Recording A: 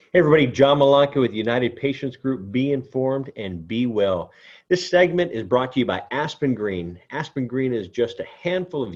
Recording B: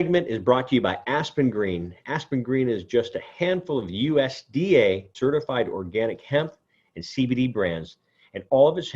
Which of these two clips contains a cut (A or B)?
B